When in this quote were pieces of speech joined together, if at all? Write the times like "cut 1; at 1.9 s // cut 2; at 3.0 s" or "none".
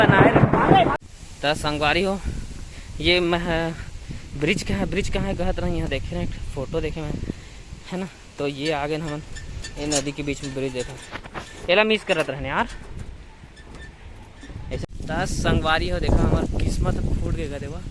cut 1; at 0.9 s // cut 2; at 14.8 s